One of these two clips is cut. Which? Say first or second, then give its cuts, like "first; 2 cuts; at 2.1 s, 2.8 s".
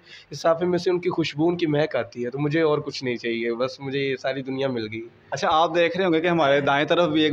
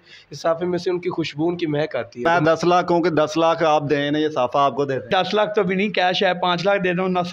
second; 2 cuts; at 2.2 s, 5.1 s